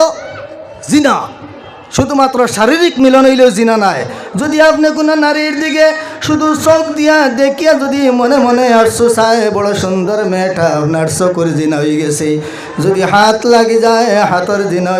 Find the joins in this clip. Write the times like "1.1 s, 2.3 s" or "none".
none